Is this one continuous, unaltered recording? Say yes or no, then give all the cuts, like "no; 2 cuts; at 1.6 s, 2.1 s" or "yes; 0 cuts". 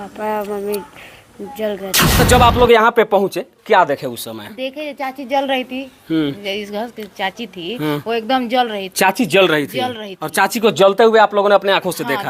no; 1 cut; at 2.1 s